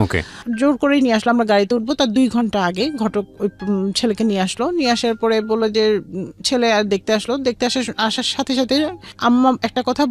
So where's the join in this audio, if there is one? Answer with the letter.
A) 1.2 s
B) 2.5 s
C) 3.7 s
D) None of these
D